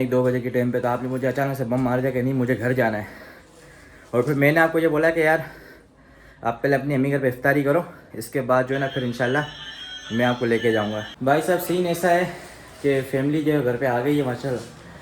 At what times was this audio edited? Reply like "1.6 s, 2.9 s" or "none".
11.1 s